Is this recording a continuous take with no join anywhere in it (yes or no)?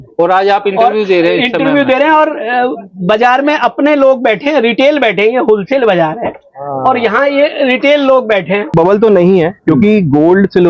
no